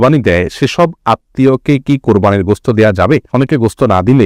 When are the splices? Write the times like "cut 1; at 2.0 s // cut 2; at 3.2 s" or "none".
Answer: none